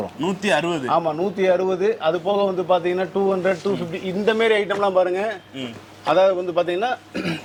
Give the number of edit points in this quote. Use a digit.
0